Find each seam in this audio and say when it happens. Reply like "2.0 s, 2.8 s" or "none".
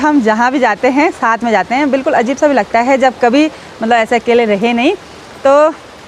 none